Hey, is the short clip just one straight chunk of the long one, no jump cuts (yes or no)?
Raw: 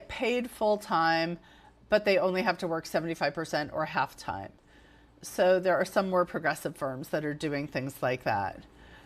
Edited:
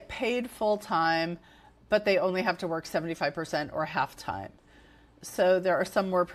yes